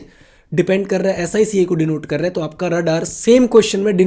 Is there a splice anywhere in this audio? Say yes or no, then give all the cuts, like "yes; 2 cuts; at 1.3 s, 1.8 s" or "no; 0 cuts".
no; 0 cuts